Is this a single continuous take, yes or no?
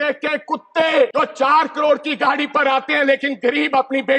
no